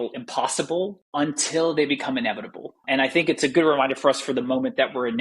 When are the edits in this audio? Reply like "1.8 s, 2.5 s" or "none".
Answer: none